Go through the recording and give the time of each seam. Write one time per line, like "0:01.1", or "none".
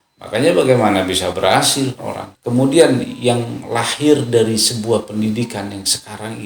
0:02.3